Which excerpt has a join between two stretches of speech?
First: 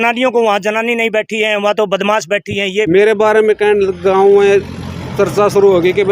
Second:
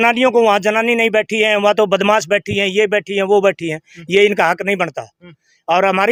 first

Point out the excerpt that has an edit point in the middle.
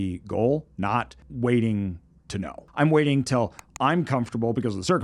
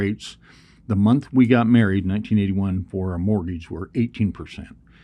first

